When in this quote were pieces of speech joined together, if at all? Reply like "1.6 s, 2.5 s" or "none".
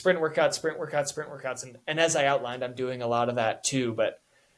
none